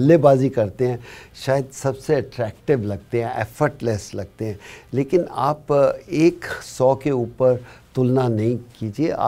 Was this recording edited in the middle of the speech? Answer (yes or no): no